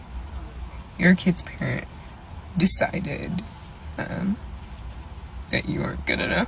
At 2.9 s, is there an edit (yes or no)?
no